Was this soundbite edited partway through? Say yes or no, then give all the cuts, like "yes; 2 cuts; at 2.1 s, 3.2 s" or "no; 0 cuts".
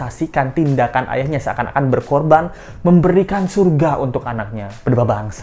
no; 0 cuts